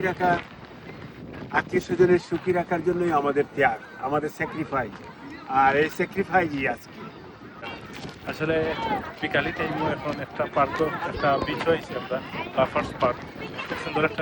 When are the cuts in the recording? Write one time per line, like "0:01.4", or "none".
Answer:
0:07.4